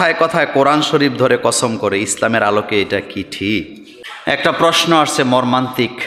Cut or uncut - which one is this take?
cut